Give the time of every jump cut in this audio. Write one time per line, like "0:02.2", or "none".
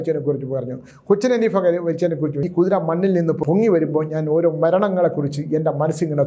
0:02.4
0:03.4